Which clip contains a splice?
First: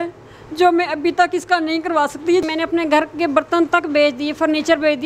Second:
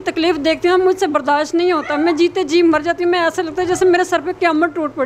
first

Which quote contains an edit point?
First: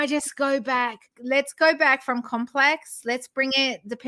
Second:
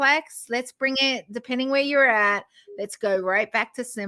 first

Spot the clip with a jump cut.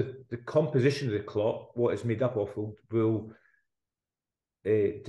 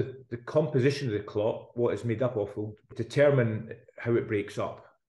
second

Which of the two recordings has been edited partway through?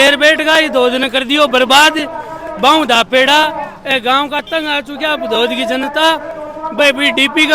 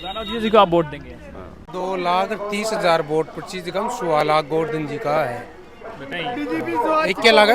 second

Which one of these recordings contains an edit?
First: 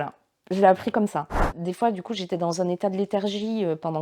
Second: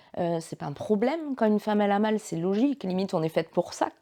first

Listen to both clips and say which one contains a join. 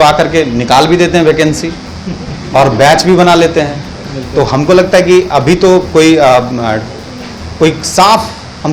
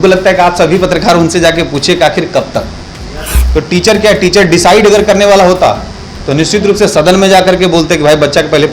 second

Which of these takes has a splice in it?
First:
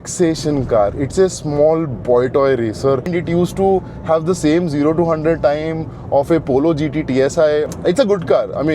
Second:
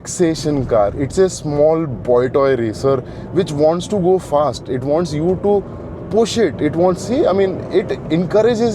first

